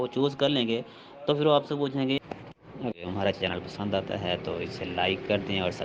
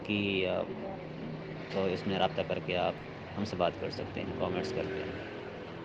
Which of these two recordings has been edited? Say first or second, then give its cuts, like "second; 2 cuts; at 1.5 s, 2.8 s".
first; 1 cut; at 2.2 s